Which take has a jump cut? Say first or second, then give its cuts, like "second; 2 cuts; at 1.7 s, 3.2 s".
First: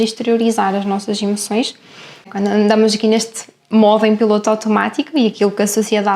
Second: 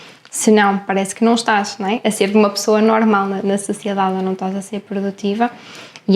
first; 1 cut; at 2.2 s